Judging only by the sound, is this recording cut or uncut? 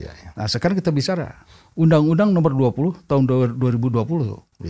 uncut